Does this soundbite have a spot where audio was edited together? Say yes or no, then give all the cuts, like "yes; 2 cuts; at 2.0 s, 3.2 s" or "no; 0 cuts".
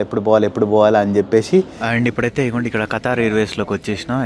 yes; 1 cut; at 1.8 s